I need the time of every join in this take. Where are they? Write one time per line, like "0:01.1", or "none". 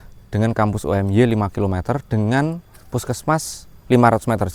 none